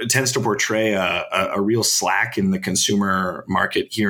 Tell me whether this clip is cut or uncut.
uncut